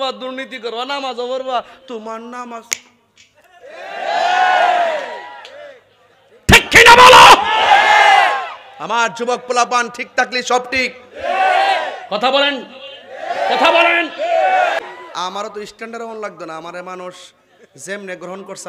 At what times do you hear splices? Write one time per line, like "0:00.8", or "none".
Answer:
0:14.8